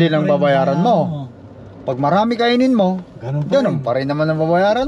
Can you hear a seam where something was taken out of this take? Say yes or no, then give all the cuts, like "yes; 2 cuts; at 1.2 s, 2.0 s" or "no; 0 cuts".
no; 0 cuts